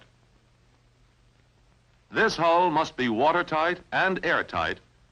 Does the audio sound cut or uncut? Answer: cut